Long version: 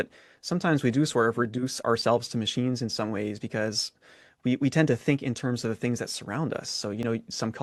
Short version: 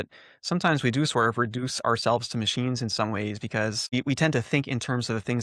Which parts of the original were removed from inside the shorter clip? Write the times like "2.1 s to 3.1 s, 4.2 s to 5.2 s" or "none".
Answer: 3.8 s to 4.4 s